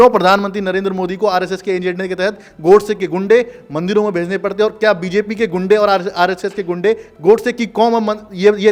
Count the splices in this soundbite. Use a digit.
0